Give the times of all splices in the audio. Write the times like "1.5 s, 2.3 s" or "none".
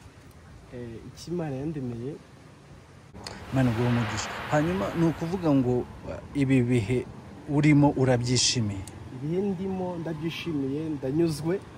3.2 s

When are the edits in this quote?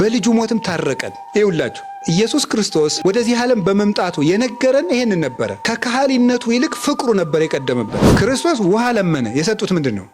8.0 s

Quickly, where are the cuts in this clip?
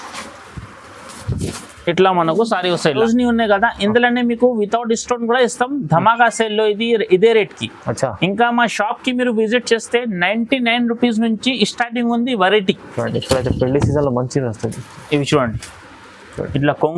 3.0 s, 12.9 s

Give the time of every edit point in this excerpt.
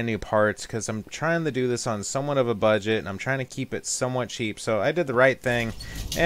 none

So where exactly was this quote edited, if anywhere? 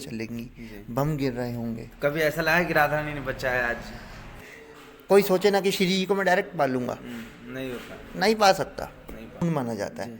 4.3 s, 9.4 s

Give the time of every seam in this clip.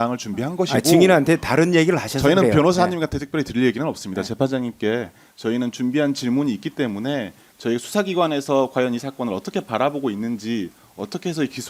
none

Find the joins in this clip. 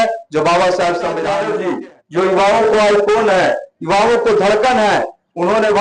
1.4 s

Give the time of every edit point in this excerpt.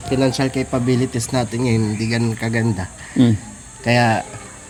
none

